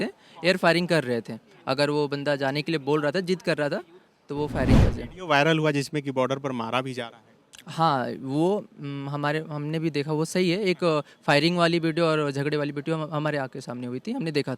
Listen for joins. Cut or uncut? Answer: cut